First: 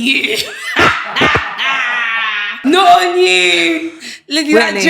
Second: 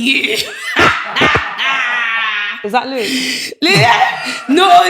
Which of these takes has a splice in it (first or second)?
first